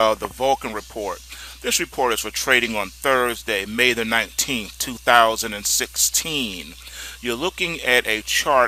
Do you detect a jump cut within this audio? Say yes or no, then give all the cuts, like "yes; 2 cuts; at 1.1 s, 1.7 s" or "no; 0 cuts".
no; 0 cuts